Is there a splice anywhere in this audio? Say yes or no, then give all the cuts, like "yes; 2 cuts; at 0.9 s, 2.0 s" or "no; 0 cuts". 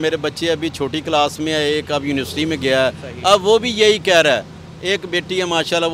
no; 0 cuts